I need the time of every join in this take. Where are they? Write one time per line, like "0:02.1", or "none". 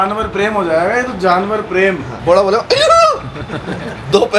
0:02.1